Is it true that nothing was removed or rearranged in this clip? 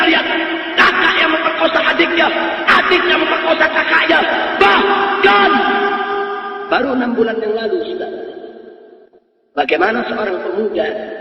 yes; 0 cuts

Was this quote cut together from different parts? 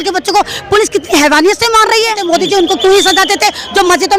yes; 1 cut; at 2.2 s

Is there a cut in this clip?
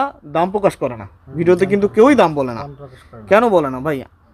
no; 0 cuts

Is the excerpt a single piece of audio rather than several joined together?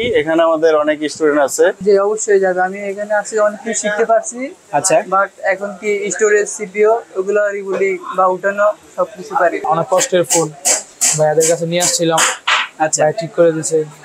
no; 2 cuts; at 1.8 s, 9.6 s

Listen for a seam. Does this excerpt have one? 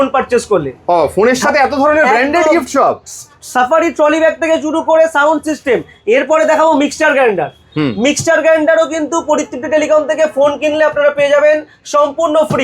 no; 0 cuts

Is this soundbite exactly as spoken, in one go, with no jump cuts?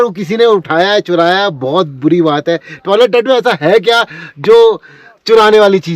yes; 0 cuts

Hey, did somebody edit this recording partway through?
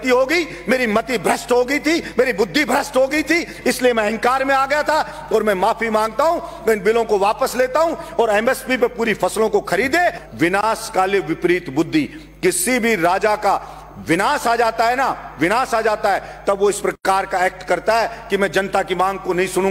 yes; 1 cut; at 10.2 s

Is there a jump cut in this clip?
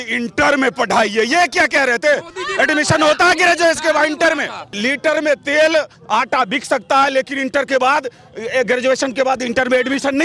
yes; 1 cut; at 4.7 s

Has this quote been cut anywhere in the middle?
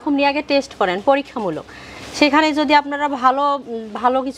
no; 0 cuts

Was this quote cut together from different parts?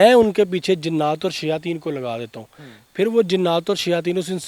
no; 0 cuts

